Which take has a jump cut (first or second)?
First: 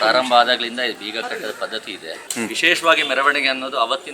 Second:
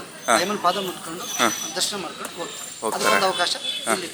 first